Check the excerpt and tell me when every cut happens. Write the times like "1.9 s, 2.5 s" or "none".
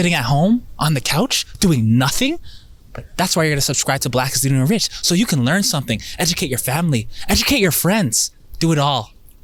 none